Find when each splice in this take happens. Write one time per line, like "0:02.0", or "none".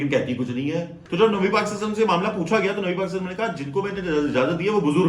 0:01.0

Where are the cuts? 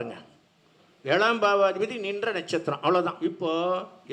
0:03.2

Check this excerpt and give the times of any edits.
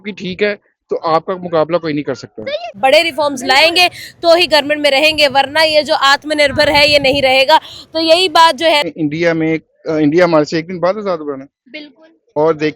0:02.8
0:08.8

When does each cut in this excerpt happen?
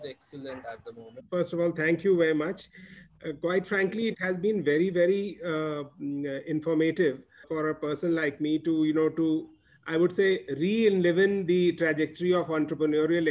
0:01.2
0:07.4

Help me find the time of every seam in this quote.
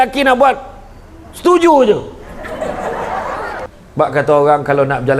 0:03.7

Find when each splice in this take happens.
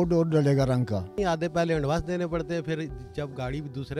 0:01.1

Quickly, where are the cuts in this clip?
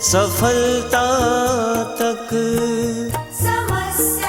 0:03.1

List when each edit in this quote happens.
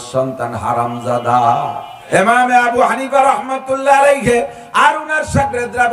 0:01.9

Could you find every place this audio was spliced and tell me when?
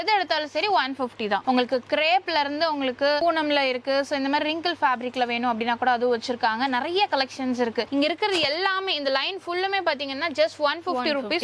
0:01.4
0:03.2
0:07.9

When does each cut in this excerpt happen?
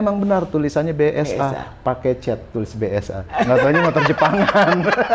none

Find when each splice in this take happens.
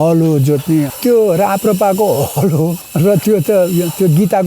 0:00.9
0:02.8

